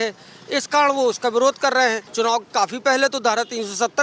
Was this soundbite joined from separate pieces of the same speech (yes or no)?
yes